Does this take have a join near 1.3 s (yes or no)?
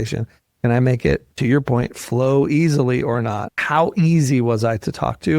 no